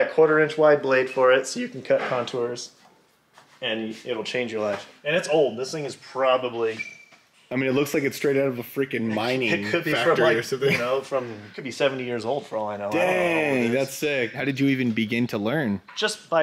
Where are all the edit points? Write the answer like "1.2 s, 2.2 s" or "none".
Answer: 4.9 s, 14.4 s